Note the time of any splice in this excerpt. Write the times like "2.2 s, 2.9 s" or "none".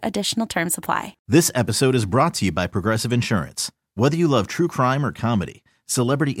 1.2 s